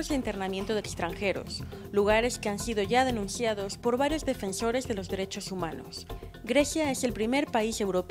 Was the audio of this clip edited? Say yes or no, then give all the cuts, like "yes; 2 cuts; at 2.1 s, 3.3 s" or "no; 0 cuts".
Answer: no; 0 cuts